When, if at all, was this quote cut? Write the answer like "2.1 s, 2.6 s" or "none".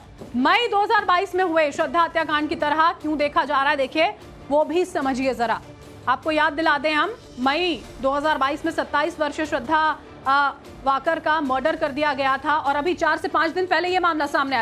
8.2 s